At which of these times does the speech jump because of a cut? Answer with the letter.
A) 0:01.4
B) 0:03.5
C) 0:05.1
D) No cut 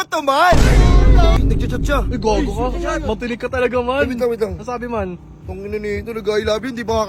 A